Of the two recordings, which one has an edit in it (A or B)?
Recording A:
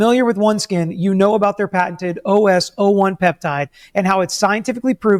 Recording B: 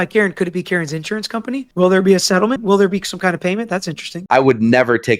B